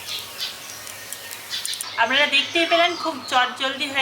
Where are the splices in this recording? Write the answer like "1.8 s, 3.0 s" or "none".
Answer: 1.8 s